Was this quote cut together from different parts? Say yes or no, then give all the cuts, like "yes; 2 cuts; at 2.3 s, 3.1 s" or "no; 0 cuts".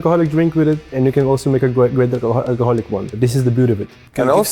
yes; 1 cut; at 3.2 s